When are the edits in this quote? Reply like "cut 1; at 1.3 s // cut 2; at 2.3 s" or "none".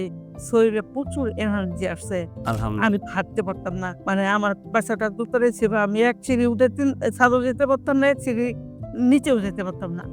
cut 1; at 3.9 s

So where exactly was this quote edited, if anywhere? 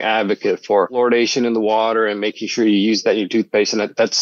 cut 1; at 1.0 s

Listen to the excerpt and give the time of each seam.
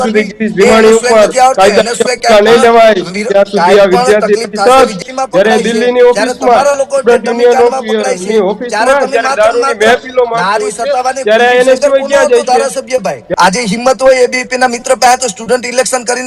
cut 1; at 5.0 s // cut 2; at 13.2 s

